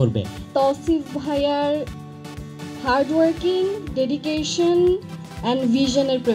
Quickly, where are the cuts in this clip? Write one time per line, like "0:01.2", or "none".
none